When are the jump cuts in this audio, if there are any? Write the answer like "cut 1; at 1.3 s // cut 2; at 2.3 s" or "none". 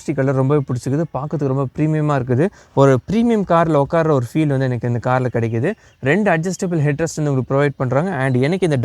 none